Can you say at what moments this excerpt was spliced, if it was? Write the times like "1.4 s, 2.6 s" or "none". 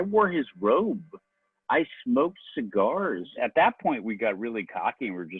3.3 s